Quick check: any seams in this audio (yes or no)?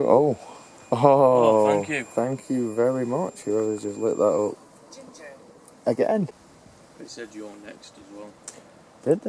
yes